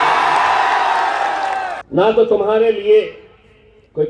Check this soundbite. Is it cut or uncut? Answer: cut